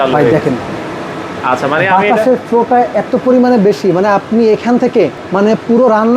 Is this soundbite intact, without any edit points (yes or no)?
no